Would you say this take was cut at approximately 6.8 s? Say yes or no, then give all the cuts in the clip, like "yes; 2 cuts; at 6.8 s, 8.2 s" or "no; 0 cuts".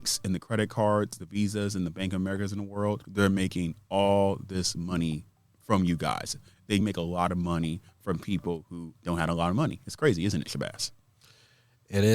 yes; 2 cuts; at 6.8 s, 8.9 s